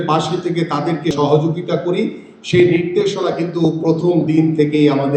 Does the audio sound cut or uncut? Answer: cut